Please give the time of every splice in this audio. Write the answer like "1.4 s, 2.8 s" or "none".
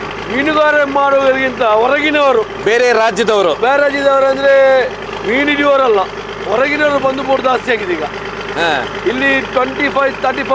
none